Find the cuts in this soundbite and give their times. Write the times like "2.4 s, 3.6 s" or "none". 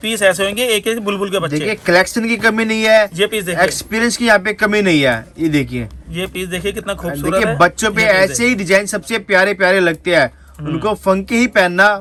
none